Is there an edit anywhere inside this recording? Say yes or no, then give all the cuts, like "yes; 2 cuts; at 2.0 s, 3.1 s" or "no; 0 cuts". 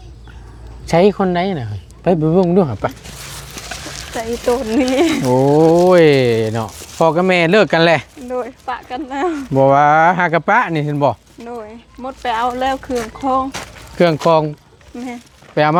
no; 0 cuts